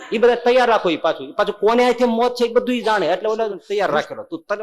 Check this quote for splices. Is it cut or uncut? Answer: cut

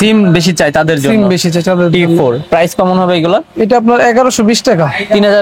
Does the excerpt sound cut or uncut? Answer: uncut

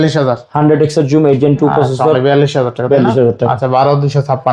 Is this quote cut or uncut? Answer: uncut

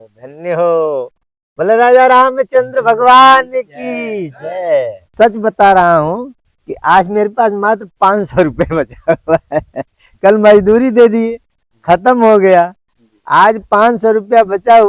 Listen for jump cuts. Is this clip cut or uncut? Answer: cut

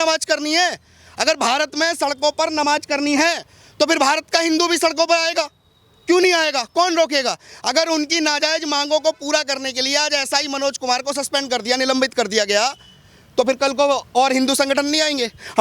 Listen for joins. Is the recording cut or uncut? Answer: uncut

